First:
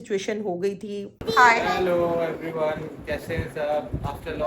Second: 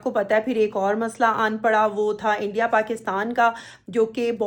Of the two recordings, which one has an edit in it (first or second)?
first